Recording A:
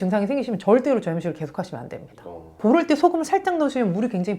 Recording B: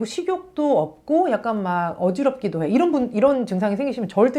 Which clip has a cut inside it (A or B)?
A